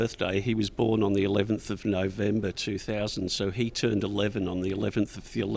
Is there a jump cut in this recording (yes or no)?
no